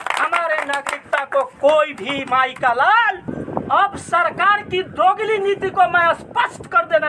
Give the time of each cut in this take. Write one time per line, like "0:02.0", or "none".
0:03.4